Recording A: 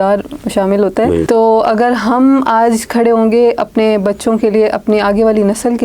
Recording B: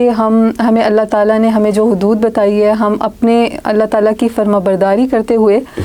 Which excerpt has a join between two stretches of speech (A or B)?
A